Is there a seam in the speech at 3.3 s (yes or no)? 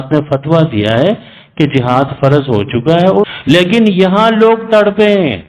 yes